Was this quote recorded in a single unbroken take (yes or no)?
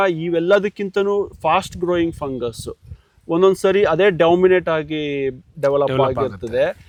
yes